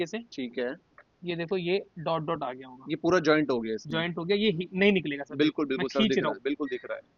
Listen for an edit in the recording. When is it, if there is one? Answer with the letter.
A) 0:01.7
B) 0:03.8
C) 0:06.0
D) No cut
D